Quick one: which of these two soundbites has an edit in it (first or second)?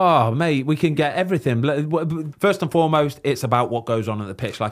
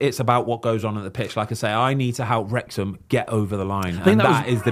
first